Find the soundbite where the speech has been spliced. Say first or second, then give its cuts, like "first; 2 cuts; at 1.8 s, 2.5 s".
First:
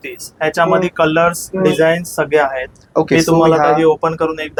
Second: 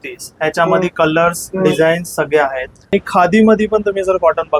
second; 1 cut; at 2.9 s